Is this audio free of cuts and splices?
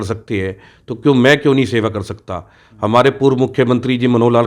yes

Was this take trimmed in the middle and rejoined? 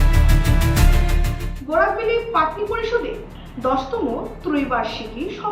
yes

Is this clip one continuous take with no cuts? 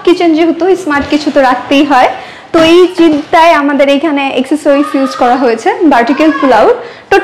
yes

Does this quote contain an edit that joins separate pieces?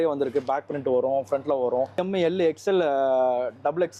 no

